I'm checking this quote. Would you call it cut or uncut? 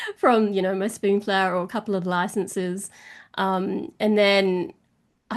uncut